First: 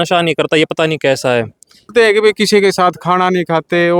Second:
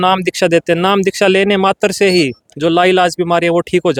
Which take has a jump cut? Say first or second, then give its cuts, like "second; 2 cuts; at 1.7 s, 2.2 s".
first; 1 cut; at 1.9 s